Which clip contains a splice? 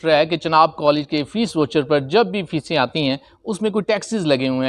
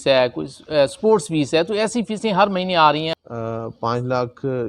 second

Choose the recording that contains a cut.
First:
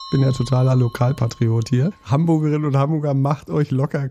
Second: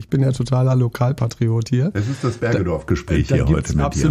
first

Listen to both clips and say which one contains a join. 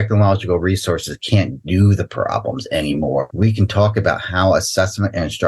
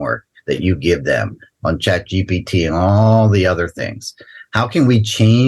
first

